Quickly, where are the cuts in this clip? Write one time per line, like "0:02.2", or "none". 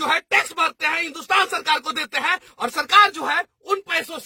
none